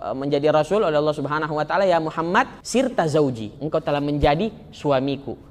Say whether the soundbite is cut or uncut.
cut